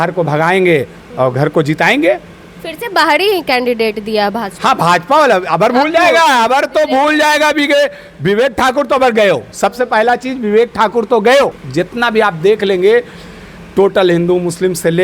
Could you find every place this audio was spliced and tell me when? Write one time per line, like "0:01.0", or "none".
0:11.6